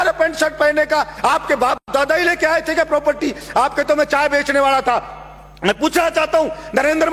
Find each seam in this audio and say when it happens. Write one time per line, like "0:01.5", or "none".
none